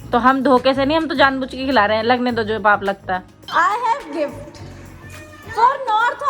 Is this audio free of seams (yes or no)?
no